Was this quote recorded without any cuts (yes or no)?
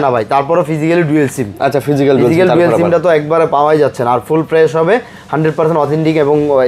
yes